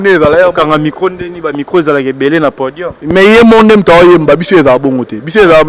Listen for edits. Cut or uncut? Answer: uncut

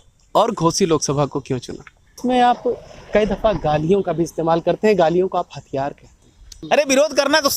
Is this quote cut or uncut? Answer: cut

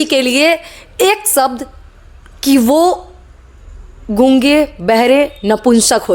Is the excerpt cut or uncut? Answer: uncut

